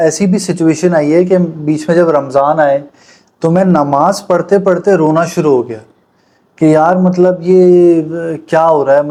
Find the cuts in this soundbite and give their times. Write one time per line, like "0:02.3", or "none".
none